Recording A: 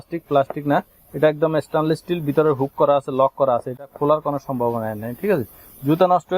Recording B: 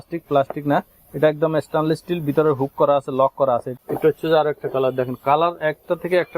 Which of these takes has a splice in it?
B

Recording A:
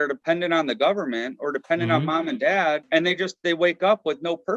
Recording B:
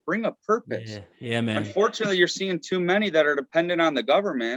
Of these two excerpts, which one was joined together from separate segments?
A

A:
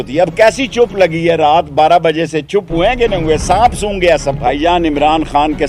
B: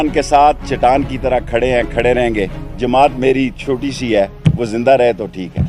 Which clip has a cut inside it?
A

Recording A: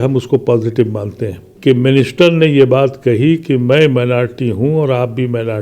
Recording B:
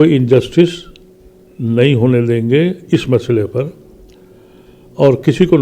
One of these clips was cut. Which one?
A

